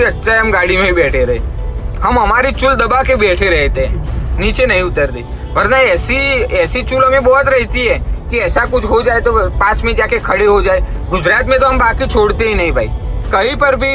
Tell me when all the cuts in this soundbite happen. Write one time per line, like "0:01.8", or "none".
none